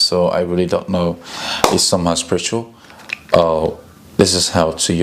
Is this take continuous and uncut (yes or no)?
yes